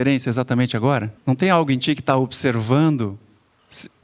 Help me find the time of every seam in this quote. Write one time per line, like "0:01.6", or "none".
0:01.1